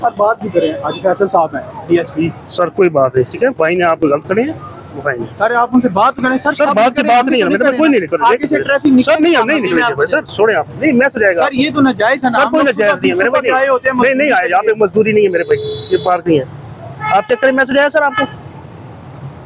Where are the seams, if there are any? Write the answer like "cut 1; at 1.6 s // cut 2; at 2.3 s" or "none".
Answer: none

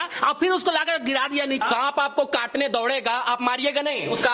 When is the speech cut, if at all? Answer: cut 1; at 1.6 s

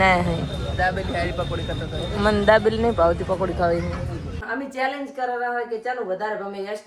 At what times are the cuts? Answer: cut 1; at 4.4 s

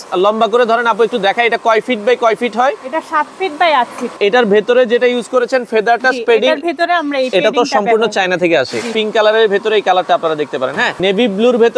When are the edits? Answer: cut 1; at 4.1 s // cut 2; at 8.9 s // cut 3; at 11.0 s

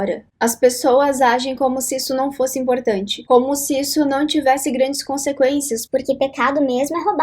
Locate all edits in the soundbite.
cut 1; at 3.1 s

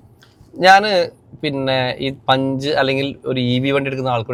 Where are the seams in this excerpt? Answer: none

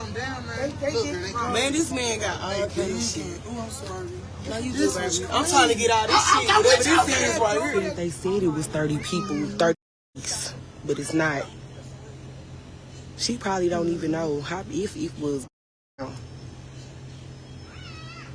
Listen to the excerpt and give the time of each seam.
cut 1; at 8.0 s

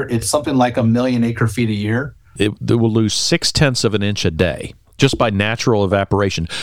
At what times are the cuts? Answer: cut 1; at 2.3 s

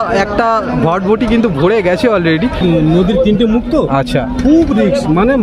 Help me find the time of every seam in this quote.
cut 1; at 2.6 s

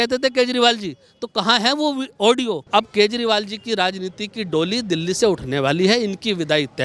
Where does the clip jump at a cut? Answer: cut 1; at 2.6 s

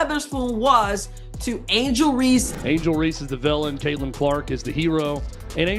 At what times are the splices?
cut 1; at 2.5 s

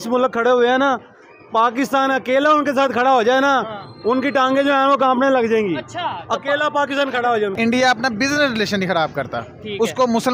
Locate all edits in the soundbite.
cut 1; at 7.5 s

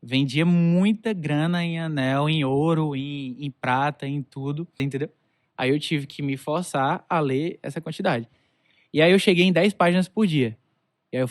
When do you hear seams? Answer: cut 1; at 4.8 s

